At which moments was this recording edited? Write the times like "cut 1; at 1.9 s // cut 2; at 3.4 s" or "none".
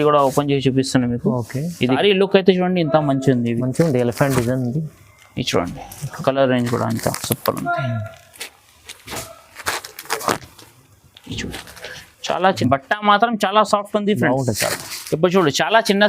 cut 1; at 2.0 s // cut 2; at 12.6 s